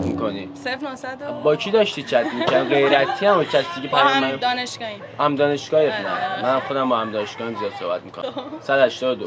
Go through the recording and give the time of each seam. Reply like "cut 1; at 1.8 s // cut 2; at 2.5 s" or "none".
cut 1; at 8.2 s